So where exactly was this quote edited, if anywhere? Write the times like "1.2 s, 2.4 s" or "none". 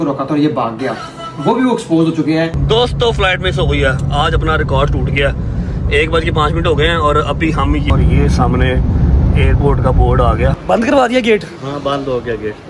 2.6 s, 7.9 s, 10.7 s